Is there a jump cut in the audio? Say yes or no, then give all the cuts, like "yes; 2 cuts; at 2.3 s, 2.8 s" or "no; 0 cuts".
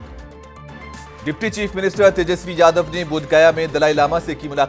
yes; 1 cut; at 1.1 s